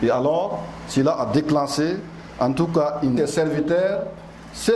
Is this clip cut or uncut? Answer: cut